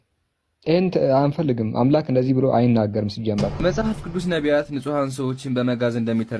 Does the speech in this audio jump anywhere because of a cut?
yes; 1 cut; at 3.5 s

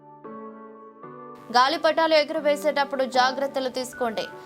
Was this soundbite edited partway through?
yes; 1 cut; at 1.4 s

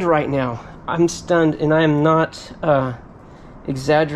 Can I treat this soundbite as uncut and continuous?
yes; 0 cuts

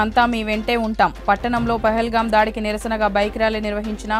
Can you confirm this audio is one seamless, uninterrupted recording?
yes; 0 cuts

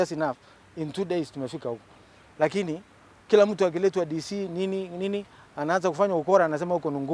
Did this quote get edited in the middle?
no; 0 cuts

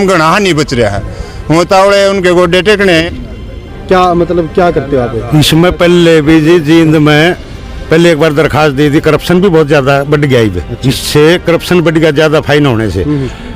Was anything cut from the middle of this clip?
yes; 1 cut; at 3.0 s

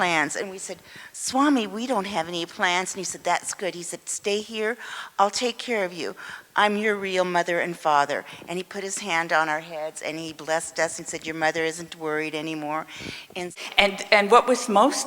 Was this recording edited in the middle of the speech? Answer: yes; 1 cut; at 13.5 s

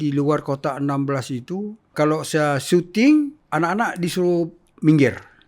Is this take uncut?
no; 2 cuts; at 1.9 s, 3.4 s

